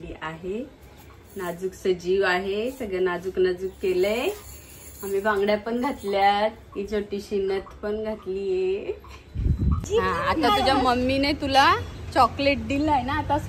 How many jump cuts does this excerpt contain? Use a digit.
1